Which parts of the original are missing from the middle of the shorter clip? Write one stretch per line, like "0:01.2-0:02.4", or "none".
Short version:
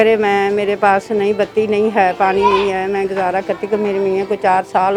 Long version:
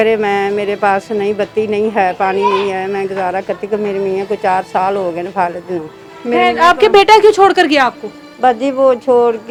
none